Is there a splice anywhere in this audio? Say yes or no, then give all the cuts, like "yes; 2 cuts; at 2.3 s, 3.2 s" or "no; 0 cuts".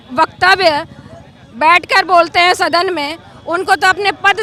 no; 0 cuts